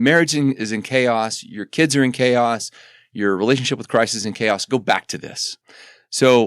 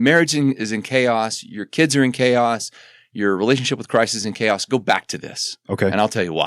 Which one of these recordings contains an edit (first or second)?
first